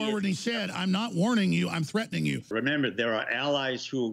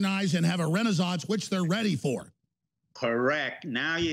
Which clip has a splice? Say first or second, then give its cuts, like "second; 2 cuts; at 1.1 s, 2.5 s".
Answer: first; 1 cut; at 2.5 s